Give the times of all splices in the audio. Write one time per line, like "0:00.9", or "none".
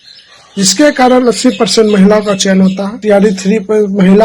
0:02.9

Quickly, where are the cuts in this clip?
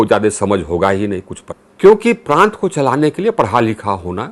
0:01.4

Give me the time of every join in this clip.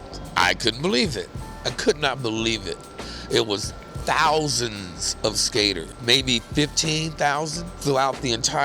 0:05.9
0:07.8

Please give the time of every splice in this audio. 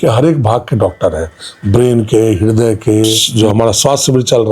0:03.2

